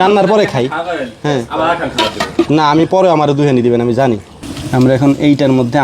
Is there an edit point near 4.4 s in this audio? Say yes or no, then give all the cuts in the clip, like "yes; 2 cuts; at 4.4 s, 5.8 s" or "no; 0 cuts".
yes; 1 cut; at 4.4 s